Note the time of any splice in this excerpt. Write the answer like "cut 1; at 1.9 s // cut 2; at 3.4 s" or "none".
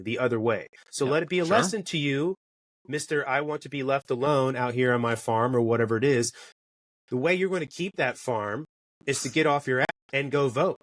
cut 1; at 9.9 s